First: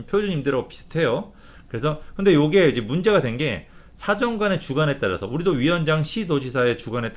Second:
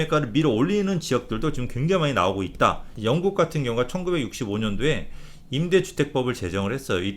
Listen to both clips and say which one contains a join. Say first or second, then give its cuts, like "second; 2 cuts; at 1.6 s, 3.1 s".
second; 1 cut; at 2.9 s